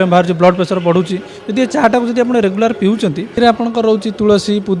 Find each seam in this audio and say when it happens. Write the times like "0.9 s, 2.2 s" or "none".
3.2 s